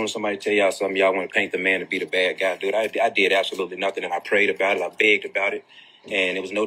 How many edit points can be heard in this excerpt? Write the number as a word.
zero